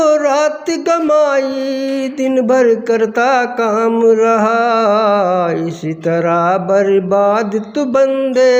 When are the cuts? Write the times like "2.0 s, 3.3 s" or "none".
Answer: none